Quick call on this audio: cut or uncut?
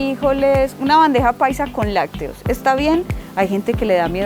cut